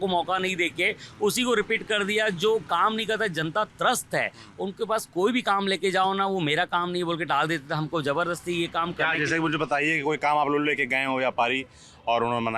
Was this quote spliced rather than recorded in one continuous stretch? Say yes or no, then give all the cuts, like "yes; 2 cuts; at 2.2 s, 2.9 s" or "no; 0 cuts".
no; 0 cuts